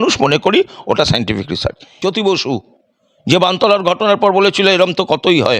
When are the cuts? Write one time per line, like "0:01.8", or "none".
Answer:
0:01.9